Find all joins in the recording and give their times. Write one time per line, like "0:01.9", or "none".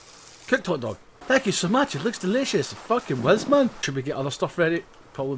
0:01.1
0:04.0